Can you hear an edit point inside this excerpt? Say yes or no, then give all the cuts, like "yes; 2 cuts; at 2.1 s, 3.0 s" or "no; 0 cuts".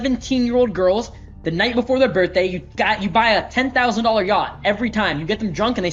no; 0 cuts